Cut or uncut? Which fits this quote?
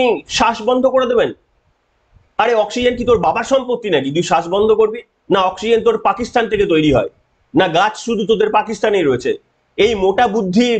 uncut